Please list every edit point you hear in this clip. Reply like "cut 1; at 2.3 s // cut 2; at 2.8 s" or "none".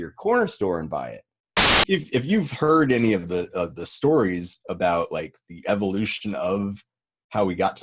cut 1; at 1.8 s